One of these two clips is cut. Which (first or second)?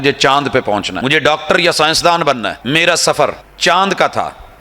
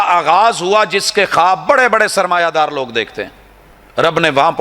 first